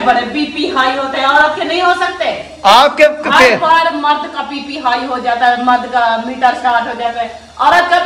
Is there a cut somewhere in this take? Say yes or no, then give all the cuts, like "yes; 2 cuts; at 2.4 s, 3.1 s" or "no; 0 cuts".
no; 0 cuts